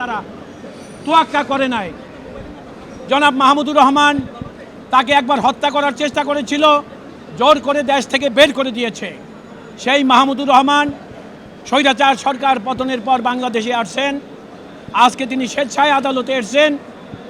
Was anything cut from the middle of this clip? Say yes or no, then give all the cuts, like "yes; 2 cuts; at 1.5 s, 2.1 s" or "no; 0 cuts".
no; 0 cuts